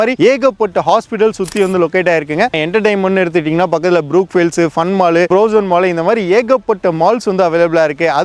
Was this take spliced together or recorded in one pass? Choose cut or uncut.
cut